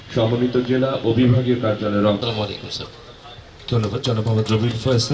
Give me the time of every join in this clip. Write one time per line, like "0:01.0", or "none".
0:02.2